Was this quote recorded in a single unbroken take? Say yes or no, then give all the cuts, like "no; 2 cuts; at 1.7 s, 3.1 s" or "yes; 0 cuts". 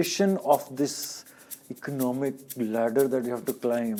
yes; 0 cuts